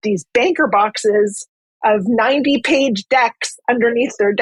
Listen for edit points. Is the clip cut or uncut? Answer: uncut